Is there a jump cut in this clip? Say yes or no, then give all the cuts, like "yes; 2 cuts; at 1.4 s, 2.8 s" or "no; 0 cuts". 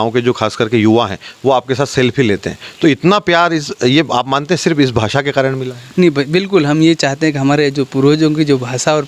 no; 0 cuts